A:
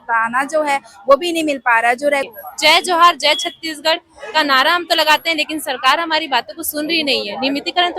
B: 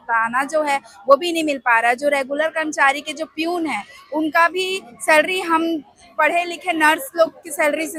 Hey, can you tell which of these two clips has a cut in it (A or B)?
A